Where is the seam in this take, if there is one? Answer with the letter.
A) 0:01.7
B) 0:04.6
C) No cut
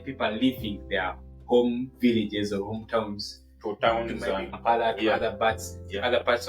B